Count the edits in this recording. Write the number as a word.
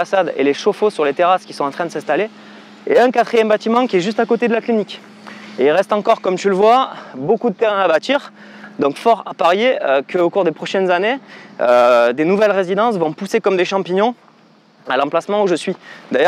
zero